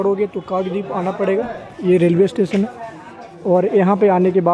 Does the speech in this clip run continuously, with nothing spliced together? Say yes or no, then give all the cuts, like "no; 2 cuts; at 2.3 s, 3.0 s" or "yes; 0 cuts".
yes; 0 cuts